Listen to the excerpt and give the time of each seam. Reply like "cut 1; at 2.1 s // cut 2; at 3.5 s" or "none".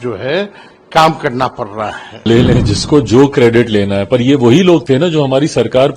cut 1; at 2.3 s